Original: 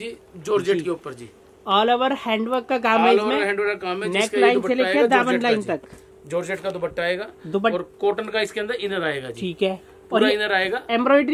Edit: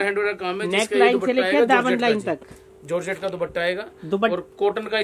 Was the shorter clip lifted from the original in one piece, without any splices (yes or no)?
yes